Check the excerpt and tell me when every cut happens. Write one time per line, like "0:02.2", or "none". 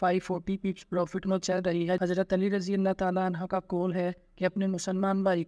0:02.0